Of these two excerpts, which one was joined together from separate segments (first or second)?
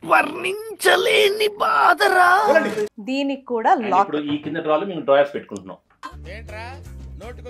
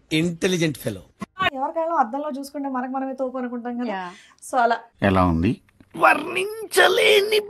first